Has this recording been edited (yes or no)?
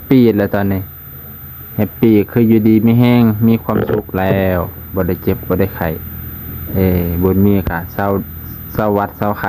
no